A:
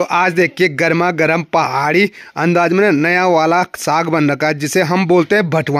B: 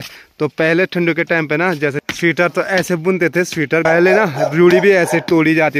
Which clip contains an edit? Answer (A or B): B